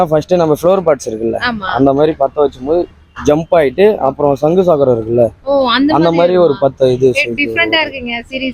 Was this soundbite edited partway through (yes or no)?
no